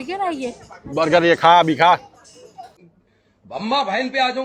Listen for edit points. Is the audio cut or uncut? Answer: uncut